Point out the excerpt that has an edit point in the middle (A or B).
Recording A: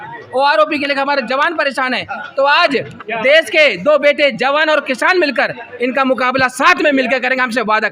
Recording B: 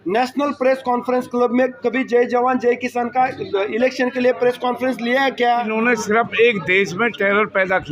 B